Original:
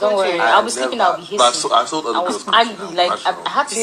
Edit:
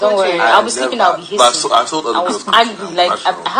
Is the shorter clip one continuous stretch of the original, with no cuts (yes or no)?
yes